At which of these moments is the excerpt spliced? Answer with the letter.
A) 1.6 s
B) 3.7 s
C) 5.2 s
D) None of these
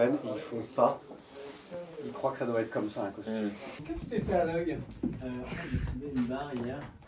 B